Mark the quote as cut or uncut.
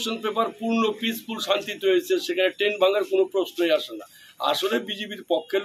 uncut